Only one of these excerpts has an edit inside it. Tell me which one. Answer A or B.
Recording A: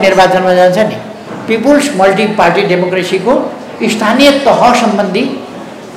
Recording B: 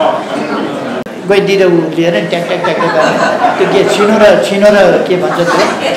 B